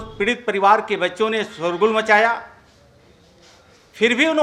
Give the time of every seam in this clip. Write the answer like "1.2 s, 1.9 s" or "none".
none